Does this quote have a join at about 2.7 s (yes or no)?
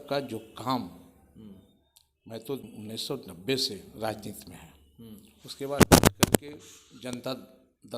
yes